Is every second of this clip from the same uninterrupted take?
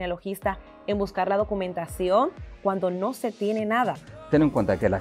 no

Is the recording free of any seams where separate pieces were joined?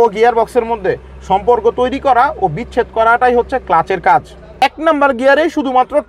no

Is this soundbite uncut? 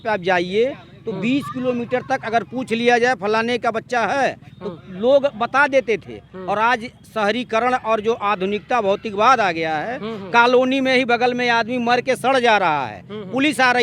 yes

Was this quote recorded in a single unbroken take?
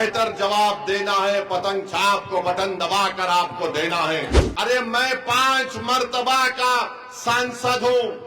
no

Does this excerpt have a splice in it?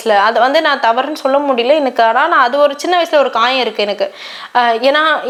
no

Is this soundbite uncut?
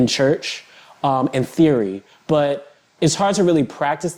yes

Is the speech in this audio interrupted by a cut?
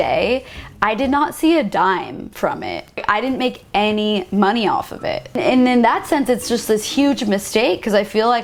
no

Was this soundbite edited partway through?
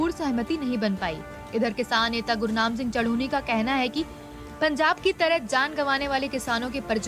yes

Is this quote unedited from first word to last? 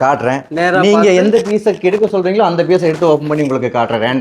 yes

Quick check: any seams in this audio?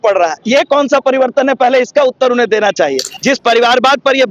yes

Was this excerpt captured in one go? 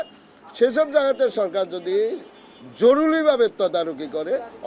yes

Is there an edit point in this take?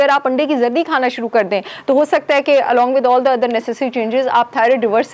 no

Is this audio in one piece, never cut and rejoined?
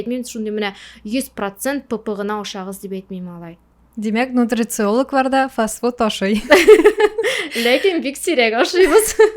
yes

